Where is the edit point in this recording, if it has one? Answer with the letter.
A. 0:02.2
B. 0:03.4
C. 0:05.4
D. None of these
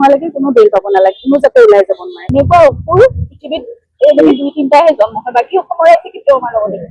A